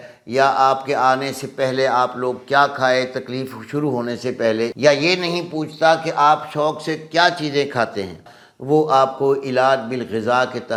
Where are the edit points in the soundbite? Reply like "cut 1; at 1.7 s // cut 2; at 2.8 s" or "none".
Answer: none